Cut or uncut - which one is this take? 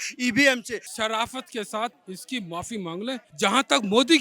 cut